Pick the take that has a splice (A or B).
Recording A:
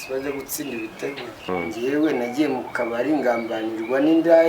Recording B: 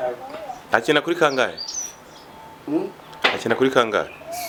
A